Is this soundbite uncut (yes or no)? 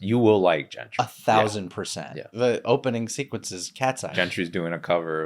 no